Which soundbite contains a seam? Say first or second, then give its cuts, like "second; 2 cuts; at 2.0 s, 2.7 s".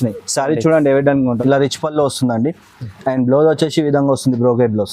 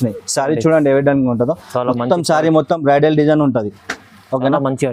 first; 1 cut; at 1.4 s